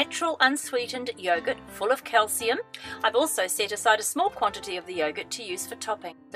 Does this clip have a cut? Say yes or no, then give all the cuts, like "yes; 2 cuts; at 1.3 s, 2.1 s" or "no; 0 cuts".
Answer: yes; 1 cut; at 3.0 s